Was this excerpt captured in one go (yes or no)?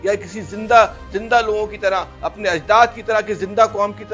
yes